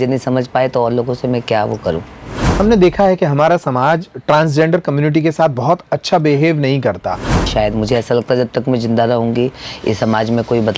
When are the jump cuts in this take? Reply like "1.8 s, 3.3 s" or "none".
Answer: 2.6 s, 7.4 s